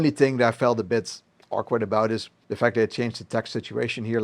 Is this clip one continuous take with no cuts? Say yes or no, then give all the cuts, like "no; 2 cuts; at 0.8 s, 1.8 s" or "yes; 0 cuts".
no; 1 cut; at 2.4 s